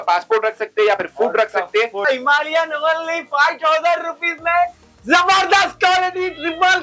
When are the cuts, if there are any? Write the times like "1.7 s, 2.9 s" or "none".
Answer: 2.0 s